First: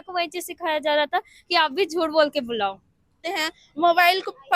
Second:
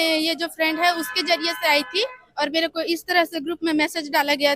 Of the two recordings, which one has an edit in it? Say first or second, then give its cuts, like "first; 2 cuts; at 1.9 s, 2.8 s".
first; 1 cut; at 3.2 s